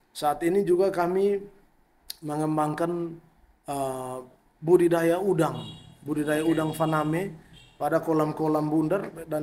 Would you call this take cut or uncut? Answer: uncut